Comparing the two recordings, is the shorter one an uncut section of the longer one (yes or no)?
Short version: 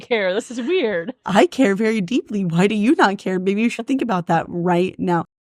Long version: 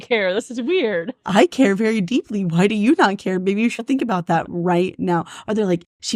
yes